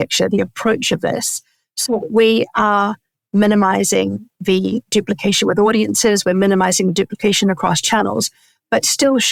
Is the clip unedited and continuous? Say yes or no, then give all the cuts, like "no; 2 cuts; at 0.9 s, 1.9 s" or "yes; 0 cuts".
yes; 0 cuts